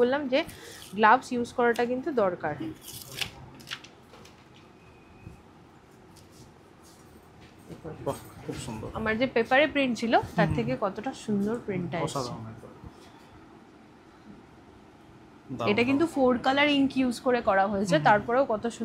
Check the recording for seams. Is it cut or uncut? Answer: uncut